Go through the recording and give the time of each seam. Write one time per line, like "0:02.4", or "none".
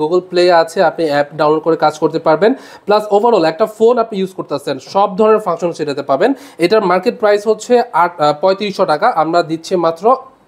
none